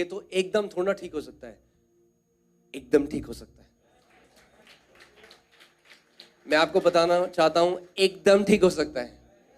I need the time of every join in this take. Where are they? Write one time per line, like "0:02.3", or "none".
none